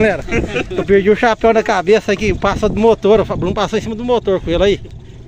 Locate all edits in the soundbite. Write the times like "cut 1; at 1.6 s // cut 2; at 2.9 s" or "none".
none